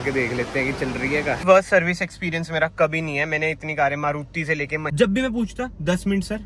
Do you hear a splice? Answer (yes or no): yes